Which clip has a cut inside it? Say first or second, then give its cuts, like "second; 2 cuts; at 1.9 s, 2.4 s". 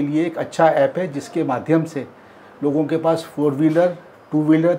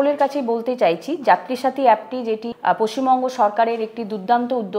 second; 1 cut; at 2.5 s